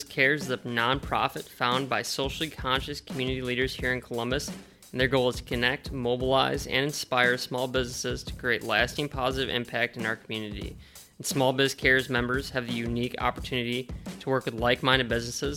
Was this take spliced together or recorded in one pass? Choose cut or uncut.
uncut